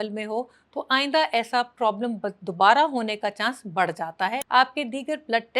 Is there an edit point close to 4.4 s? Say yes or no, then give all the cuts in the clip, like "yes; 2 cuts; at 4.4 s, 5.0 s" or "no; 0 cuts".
yes; 1 cut; at 4.4 s